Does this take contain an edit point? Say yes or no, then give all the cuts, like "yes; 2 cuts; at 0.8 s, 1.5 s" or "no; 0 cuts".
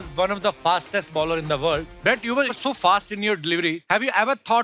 yes; 2 cuts; at 1.9 s, 3.8 s